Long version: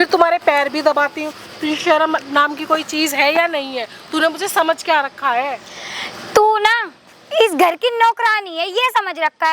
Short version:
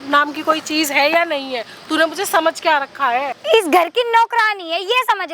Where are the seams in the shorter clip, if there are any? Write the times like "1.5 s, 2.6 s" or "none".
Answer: 3.3 s